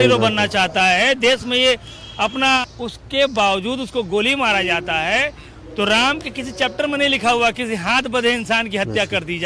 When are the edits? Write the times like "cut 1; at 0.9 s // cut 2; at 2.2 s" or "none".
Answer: cut 1; at 2.6 s